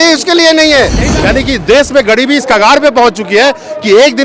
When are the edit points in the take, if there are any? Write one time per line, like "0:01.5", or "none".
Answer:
0:01.1